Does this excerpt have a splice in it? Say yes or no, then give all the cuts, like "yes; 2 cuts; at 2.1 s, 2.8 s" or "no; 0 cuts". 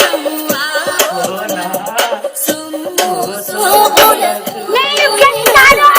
no; 0 cuts